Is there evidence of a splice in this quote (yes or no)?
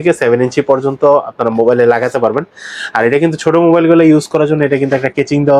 no